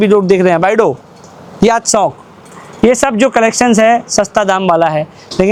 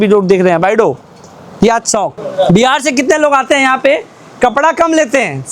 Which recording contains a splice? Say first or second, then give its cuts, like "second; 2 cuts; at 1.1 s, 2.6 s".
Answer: second; 1 cut; at 2.3 s